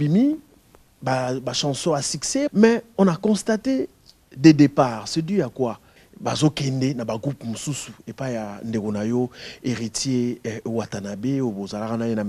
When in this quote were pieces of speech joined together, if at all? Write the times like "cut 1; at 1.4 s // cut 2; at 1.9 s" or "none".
cut 1; at 2.5 s // cut 2; at 6.0 s